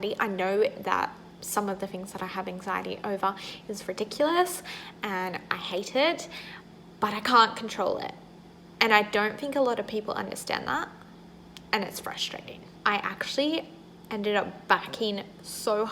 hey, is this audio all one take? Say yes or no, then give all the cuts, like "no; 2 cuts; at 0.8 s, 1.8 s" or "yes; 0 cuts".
no; 1 cut; at 12.7 s